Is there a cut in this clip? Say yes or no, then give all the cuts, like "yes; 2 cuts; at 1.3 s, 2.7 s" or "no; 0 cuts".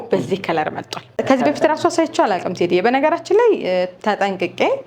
yes; 1 cut; at 1.1 s